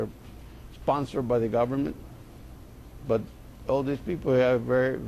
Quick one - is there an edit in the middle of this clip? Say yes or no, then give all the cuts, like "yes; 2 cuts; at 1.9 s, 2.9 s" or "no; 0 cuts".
yes; 1 cut; at 1.7 s